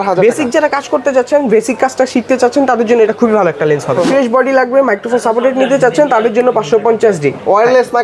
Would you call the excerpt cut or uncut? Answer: cut